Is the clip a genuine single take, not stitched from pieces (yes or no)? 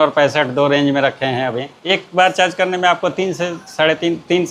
no